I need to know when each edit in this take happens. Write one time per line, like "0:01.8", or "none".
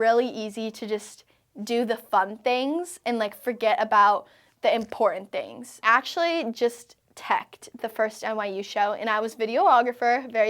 0:05.8